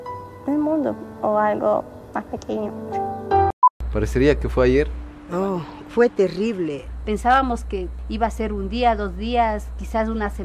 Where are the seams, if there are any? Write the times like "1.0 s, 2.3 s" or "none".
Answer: 3.5 s